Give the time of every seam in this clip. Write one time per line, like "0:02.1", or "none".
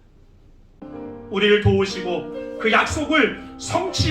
0:00.9